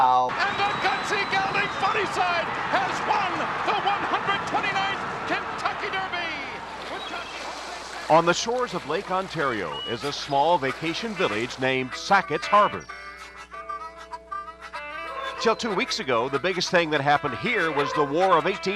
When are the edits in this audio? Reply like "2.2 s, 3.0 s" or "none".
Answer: none